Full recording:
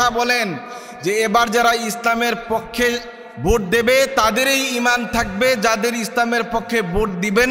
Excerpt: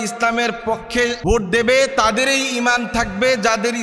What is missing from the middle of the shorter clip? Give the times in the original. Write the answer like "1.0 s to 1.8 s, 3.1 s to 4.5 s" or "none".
3.0 s to 3.4 s